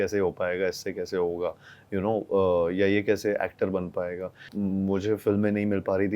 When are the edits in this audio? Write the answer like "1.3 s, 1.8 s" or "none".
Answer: 4.5 s